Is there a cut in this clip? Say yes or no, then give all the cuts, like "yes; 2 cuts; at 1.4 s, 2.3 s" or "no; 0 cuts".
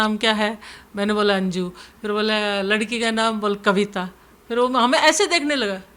no; 0 cuts